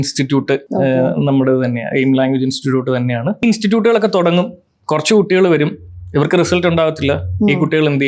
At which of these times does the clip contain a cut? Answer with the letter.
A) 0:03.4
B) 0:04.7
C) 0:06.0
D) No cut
A